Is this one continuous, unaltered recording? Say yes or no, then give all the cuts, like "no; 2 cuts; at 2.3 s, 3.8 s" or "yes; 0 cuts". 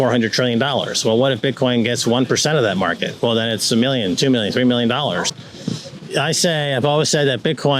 yes; 0 cuts